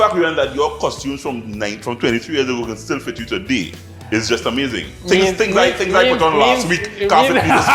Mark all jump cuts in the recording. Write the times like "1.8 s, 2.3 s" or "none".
none